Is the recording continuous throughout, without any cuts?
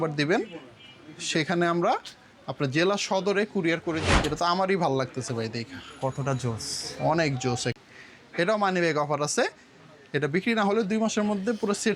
no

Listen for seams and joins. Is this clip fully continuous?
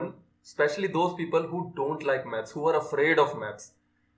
yes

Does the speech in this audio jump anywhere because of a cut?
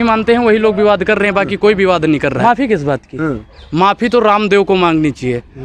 yes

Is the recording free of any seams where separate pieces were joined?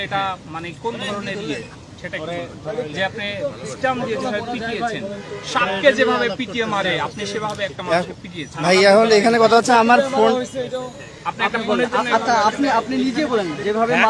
yes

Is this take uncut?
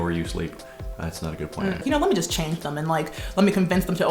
no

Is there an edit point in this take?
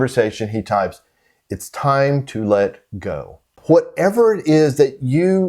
yes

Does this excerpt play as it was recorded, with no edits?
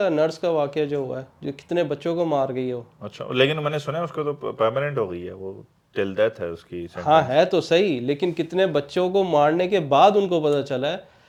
yes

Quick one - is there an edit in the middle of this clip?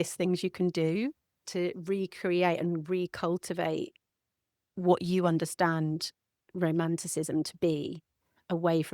yes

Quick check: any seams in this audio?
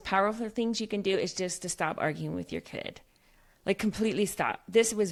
no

